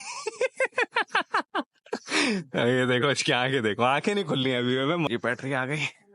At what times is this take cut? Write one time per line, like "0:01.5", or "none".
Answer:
0:05.1